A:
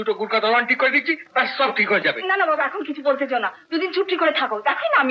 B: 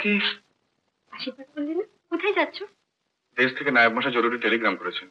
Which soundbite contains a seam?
B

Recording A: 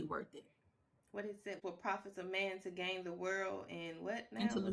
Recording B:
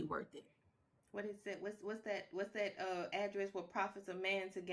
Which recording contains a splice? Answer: A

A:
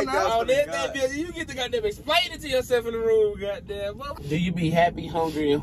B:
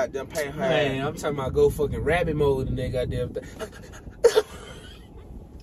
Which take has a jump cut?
A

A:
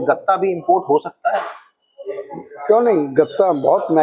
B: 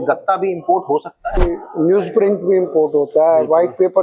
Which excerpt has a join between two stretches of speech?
B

